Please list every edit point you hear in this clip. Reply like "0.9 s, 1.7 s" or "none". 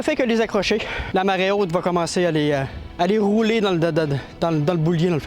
1.0 s, 2.8 s